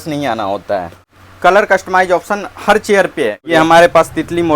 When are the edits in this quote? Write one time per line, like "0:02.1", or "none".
0:01.0
0:03.5